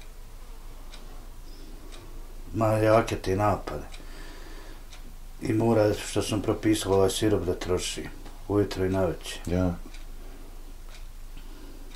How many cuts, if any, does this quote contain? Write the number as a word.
zero